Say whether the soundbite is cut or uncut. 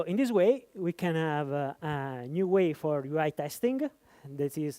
uncut